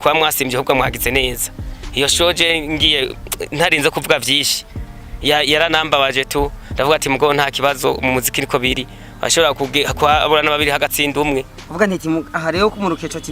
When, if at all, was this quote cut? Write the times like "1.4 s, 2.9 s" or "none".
11.6 s